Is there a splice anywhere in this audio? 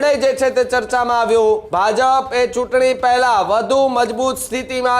yes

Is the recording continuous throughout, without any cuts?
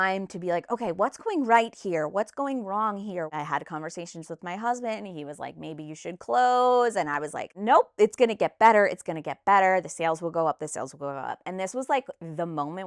no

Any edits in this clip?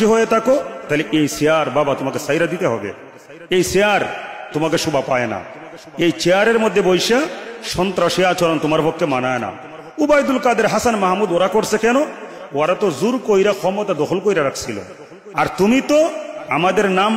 no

